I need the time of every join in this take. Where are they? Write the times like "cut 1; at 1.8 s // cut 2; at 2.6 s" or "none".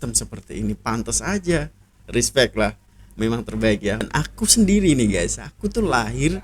cut 1; at 4.0 s